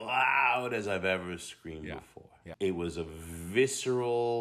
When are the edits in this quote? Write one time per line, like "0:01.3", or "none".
0:02.4